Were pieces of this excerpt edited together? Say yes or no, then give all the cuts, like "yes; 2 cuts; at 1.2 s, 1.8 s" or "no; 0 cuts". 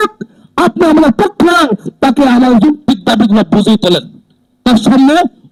no; 0 cuts